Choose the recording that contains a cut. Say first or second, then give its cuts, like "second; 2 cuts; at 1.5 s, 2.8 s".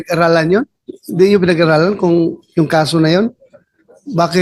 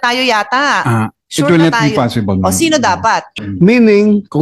second; 1 cut; at 3.3 s